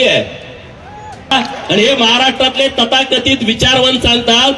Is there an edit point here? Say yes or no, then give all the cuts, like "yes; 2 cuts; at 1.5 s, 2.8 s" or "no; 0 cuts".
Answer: yes; 1 cut; at 1.3 s